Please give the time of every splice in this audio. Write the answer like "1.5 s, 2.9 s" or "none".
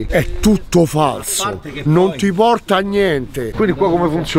3.5 s